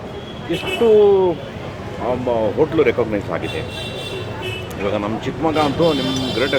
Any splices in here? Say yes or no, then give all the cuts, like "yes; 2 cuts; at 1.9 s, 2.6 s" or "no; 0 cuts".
no; 0 cuts